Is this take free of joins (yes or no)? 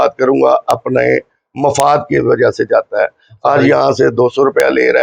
yes